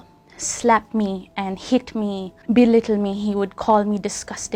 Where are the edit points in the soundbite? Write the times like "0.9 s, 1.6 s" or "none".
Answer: none